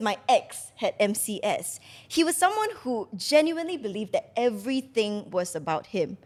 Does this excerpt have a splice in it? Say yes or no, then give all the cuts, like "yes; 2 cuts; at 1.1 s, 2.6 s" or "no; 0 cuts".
no; 0 cuts